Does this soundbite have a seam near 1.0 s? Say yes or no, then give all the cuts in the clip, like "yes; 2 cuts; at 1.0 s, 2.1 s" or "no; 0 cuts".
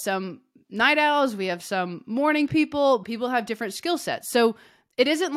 no; 1 cut; at 3.0 s